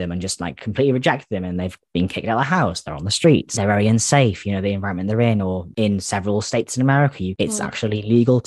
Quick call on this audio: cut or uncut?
cut